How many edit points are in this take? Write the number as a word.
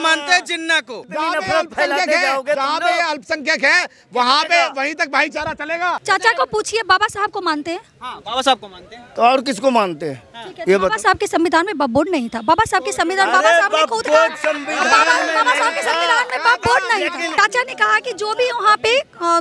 two